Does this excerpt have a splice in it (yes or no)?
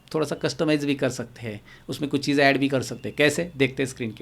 no